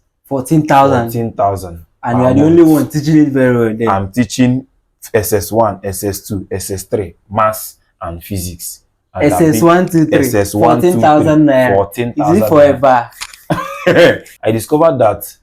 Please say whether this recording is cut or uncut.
cut